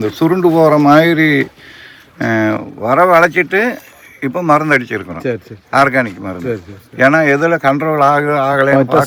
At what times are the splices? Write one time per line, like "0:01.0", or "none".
none